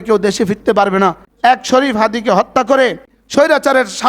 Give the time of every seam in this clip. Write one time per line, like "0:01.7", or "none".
0:01.3
0:03.1

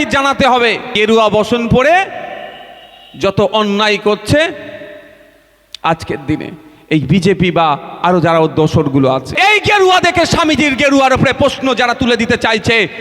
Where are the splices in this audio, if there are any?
0:00.9
0:09.3

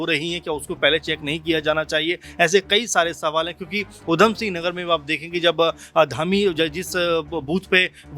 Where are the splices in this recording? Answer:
none

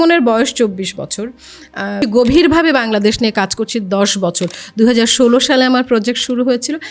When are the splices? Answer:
0:02.0

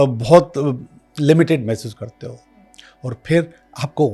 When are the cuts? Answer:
none

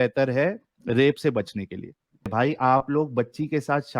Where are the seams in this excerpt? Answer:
0:02.3

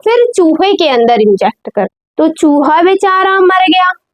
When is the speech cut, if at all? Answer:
0:02.0

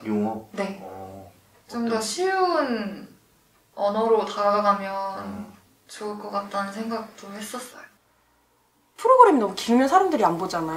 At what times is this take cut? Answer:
0:07.8

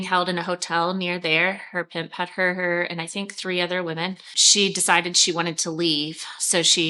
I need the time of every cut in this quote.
0:04.4

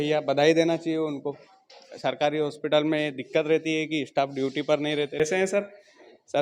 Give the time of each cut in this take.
0:05.2

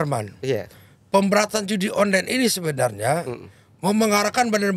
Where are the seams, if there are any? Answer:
none

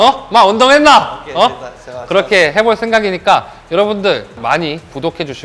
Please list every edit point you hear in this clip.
0:04.4

